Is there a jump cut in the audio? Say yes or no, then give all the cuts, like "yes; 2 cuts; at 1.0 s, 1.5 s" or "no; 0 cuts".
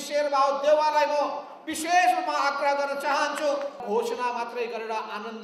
yes; 1 cut; at 3.8 s